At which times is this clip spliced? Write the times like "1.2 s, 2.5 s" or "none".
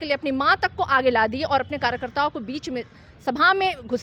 none